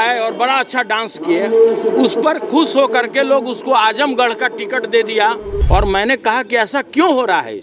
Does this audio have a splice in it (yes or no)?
yes